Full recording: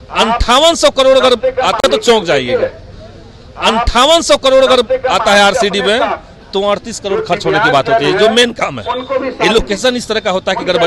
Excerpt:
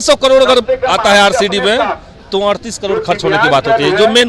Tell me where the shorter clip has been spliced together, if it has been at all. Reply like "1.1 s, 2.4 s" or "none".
1.0 s